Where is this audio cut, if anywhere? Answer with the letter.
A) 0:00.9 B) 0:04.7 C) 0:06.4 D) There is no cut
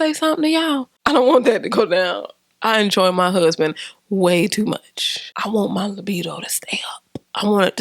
A